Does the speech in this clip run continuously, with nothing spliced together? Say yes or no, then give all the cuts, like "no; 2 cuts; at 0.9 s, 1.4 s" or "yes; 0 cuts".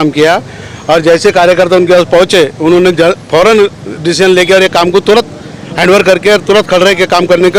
yes; 0 cuts